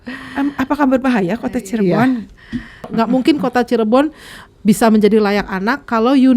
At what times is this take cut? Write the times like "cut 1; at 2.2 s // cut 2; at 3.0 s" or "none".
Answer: cut 1; at 2.9 s

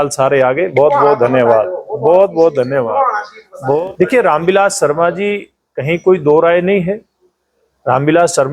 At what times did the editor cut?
cut 1; at 3.8 s

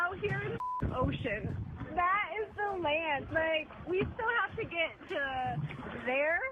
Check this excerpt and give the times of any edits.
none

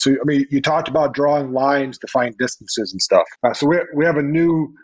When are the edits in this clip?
cut 1; at 3.3 s

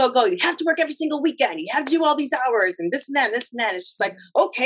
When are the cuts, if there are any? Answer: none

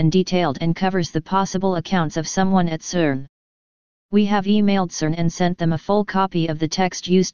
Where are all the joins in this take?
cut 1; at 4.6 s

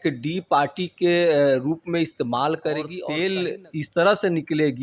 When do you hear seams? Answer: cut 1; at 3.0 s

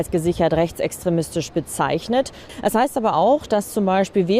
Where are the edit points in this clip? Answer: cut 1; at 2.4 s

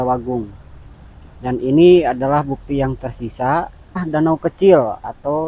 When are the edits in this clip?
cut 1; at 4.0 s

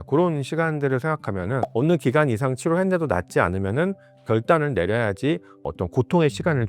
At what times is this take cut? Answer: cut 1; at 1.6 s

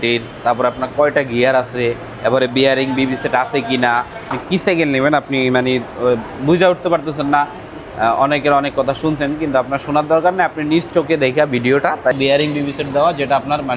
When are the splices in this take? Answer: cut 1; at 4.3 s // cut 2; at 12.1 s

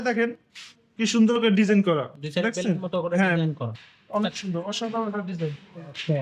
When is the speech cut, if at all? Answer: none

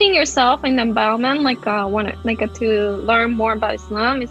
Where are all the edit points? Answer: none

